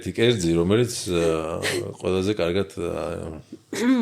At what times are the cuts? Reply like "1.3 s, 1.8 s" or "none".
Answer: none